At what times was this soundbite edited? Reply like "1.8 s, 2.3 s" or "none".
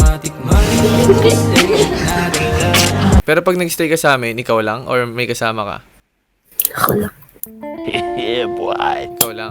3.2 s